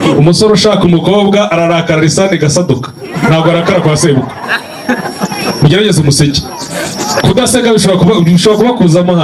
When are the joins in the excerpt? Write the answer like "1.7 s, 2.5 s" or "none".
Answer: none